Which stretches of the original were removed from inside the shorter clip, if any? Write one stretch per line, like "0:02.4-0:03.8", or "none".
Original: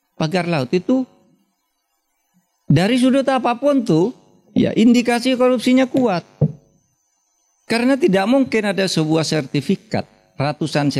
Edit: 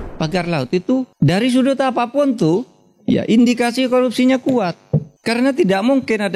0:01.1-0:02.6
0:06.6-0:07.6